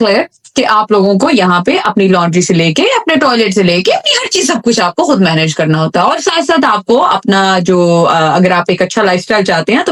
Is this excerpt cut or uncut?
uncut